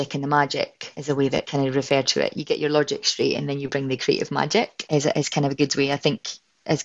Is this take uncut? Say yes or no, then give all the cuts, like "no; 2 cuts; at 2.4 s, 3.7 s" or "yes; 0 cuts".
no; 2 cuts; at 1.2 s, 4.8 s